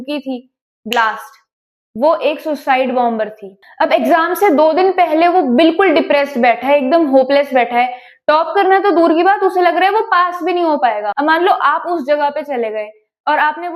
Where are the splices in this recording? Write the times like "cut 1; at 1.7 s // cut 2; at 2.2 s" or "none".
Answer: cut 1; at 3.7 s // cut 2; at 11.1 s